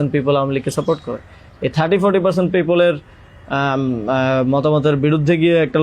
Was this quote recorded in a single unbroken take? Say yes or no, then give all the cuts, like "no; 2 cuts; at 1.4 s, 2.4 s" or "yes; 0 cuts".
yes; 0 cuts